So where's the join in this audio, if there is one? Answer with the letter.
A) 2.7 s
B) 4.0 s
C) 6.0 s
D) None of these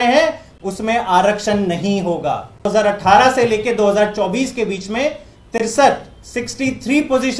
A